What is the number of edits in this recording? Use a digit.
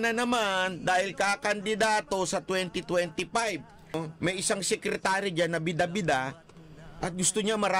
1